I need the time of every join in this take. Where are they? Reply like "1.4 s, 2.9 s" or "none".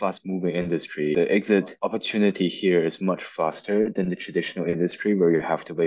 1.1 s, 1.7 s